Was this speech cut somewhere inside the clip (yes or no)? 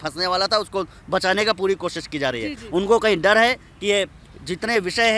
no